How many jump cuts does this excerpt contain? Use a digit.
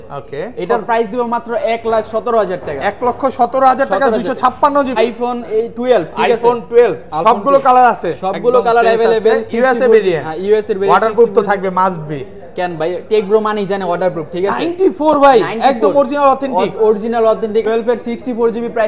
2